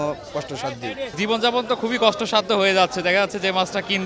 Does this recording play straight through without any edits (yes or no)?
no